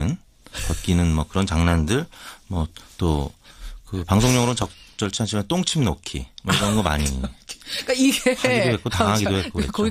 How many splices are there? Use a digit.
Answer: 1